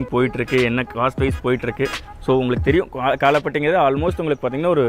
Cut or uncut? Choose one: uncut